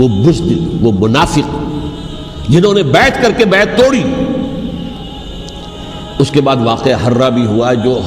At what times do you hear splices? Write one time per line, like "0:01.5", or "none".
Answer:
0:05.0

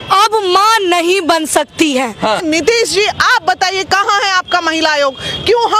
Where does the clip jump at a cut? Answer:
0:02.4

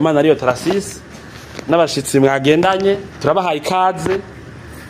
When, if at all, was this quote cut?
0:03.1

